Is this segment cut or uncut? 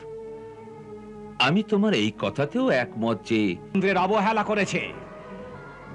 cut